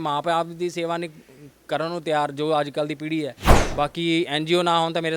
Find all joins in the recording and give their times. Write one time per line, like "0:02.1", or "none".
0:03.5